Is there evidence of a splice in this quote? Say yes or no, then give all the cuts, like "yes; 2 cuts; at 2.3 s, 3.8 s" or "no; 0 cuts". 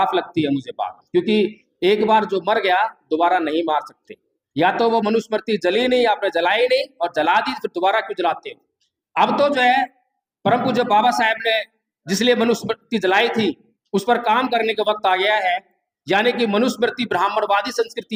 no; 0 cuts